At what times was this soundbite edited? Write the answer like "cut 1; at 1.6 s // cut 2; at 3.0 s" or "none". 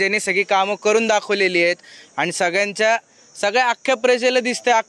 none